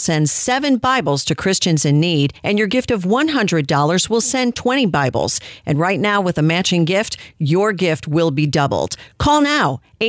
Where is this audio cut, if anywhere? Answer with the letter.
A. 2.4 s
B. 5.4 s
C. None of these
A